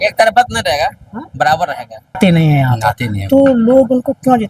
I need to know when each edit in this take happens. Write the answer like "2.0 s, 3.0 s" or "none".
2.2 s